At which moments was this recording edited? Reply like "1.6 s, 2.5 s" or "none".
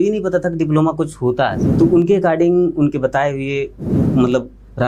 1.6 s